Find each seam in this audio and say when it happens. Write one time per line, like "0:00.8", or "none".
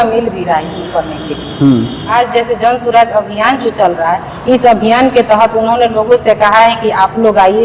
0:02.1

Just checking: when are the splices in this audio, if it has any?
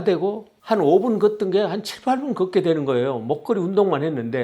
none

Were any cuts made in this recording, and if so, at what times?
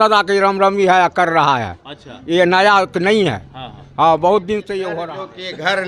0:04.9

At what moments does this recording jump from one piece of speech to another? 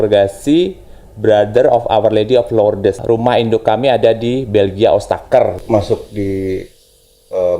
0:03.0
0:05.6

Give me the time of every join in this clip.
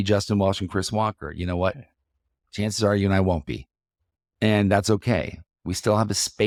none

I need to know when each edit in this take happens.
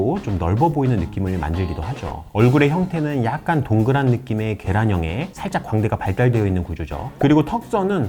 0:02.1

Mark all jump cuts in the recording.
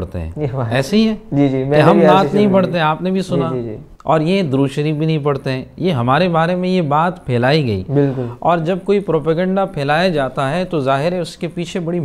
none

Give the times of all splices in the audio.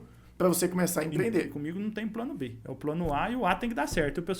0:01.5
0:02.6

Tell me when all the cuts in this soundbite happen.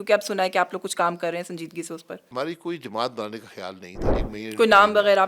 0:02.2
0:04.2

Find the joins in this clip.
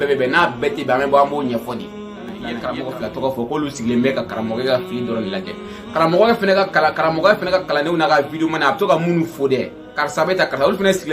0:02.5

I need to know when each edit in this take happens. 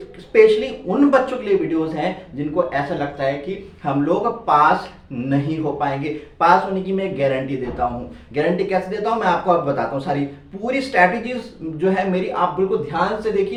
none

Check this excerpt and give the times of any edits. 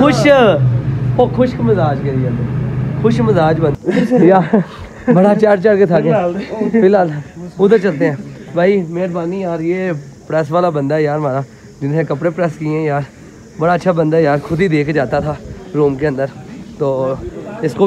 0:03.7

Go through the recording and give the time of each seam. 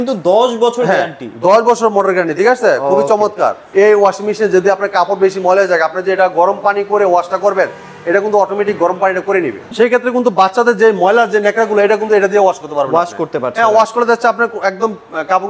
0:03.6
0:09.6

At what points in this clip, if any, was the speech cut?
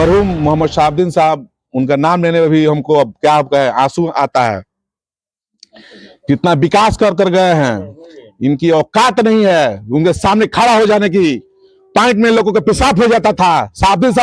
none

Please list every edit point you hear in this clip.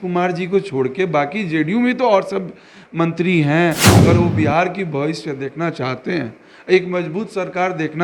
0:03.8

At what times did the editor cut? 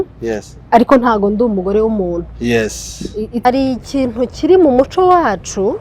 0:03.4

